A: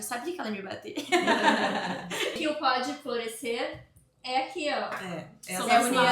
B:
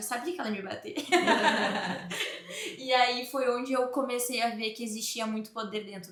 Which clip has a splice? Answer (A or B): A